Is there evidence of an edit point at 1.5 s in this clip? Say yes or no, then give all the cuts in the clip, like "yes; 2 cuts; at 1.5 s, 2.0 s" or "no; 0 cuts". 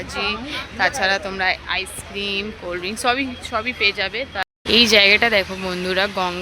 no; 1 cut; at 4.4 s